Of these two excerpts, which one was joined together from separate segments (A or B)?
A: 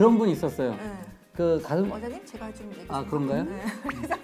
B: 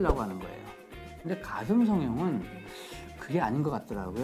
B